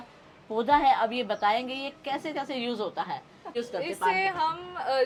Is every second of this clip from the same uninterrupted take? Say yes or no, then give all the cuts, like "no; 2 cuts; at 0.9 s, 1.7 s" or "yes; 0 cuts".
yes; 0 cuts